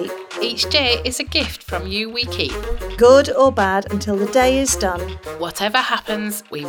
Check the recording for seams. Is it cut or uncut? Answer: uncut